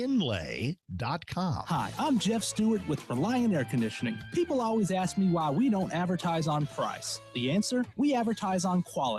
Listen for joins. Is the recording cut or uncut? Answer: cut